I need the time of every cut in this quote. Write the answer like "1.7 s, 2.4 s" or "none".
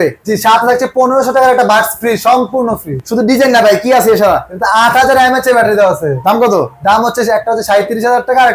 3.0 s